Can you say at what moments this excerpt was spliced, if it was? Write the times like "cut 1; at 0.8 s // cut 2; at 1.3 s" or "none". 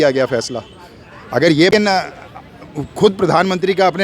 cut 1; at 1.7 s